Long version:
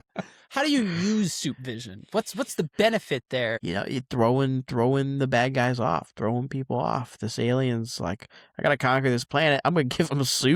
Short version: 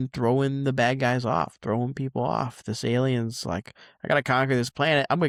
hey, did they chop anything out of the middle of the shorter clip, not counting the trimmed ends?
no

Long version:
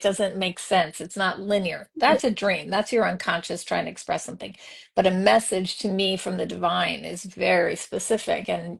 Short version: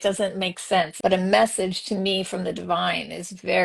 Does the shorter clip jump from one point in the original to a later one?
yes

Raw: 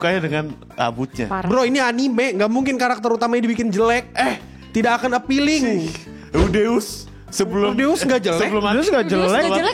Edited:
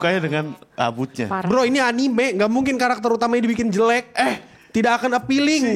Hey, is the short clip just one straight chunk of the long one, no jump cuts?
yes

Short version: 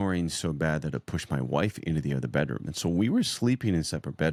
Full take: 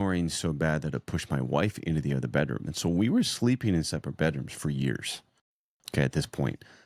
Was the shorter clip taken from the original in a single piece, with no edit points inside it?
yes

